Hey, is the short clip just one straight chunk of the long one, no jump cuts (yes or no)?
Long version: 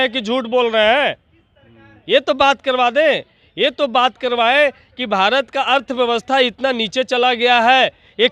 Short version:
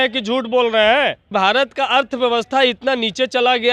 no